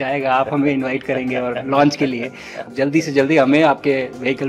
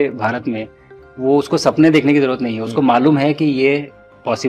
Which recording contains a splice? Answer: first; 1 cut; at 2.6 s

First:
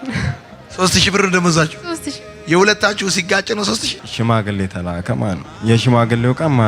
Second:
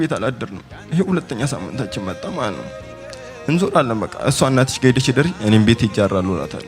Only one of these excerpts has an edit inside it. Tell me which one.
first; 2 cuts; at 4.0 s, 5.5 s

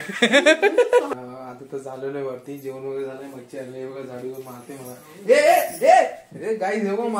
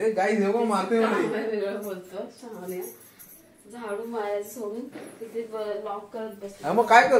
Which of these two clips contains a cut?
first; 1 cut; at 1.1 s

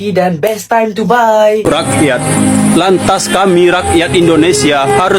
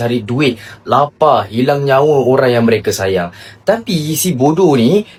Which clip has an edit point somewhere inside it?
first; 1 cut; at 1.6 s

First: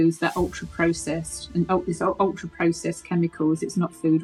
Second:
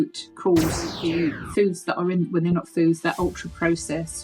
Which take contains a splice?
second; 1 cut; at 1.0 s

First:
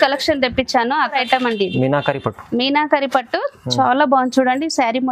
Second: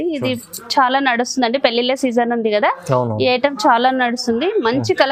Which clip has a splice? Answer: first; 1 cut; at 1.1 s

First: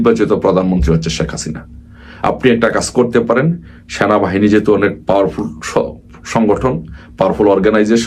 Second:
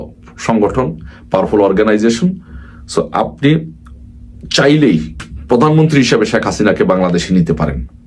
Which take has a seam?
second; 1 cut; at 5.3 s

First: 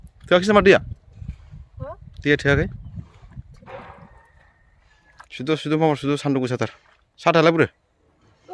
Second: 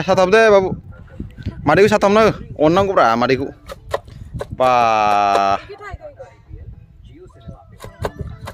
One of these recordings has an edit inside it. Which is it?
first; 1 cut; at 5.3 s

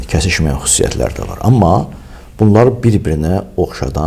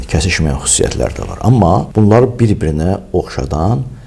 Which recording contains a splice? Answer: second; 1 cut; at 1.9 s

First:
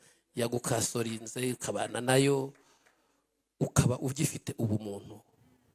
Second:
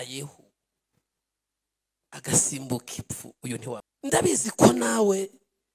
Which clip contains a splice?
second; 1 cut; at 3.9 s

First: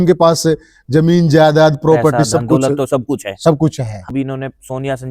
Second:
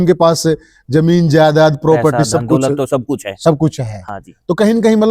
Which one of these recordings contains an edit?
first; 1 cut; at 4.1 s

